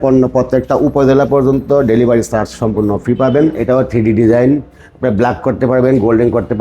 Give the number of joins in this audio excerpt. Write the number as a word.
one